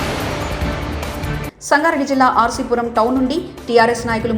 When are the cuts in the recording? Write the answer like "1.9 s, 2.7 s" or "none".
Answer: 1.4 s